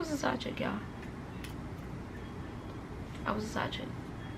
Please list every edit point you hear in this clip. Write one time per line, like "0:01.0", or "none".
none